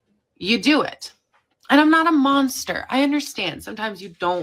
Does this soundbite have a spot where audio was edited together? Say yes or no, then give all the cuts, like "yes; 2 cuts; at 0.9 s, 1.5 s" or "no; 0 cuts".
no; 0 cuts